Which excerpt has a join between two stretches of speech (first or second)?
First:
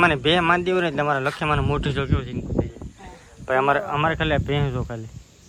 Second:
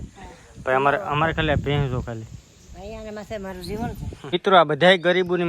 second